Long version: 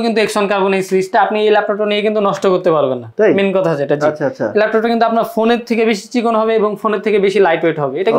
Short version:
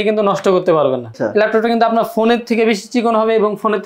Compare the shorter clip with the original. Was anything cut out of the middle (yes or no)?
yes